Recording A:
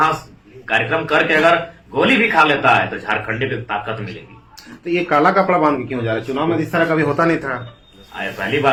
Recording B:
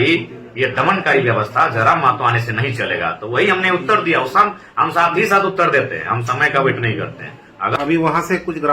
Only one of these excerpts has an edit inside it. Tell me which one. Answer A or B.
B